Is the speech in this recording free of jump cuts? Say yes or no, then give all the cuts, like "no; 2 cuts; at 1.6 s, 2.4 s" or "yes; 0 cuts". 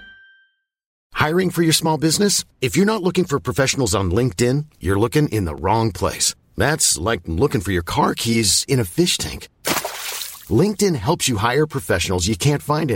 no; 1 cut; at 1.1 s